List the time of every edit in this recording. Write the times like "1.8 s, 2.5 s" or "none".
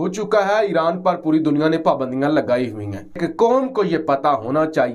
3.2 s